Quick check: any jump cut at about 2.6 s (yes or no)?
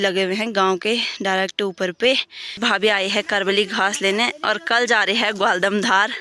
yes